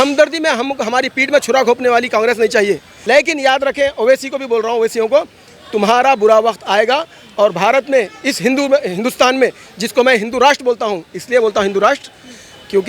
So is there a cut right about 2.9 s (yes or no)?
yes